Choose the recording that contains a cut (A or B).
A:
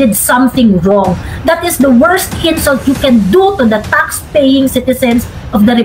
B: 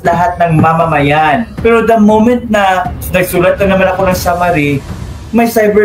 B